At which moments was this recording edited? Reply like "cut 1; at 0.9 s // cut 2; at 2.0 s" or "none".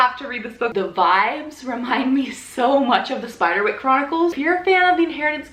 cut 1; at 0.7 s // cut 2; at 4.3 s

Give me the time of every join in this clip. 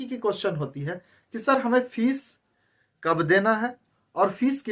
none

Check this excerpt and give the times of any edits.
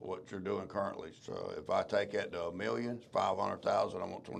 cut 1; at 1.1 s // cut 2; at 3.0 s

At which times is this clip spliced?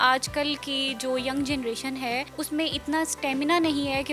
cut 1; at 2.3 s

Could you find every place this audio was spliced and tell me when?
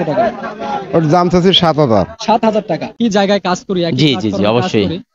cut 1; at 3.0 s

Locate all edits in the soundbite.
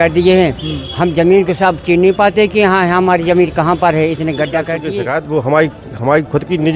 cut 1; at 4.8 s

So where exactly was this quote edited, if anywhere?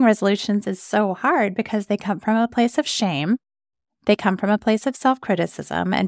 none

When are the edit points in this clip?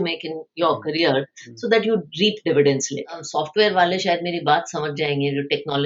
cut 1; at 3.2 s

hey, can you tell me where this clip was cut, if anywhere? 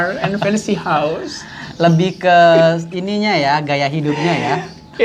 none

